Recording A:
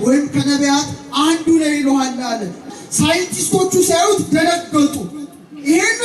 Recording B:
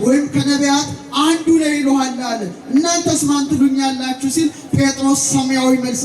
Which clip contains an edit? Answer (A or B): A